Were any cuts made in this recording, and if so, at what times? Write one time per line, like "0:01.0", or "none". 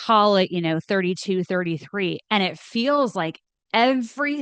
none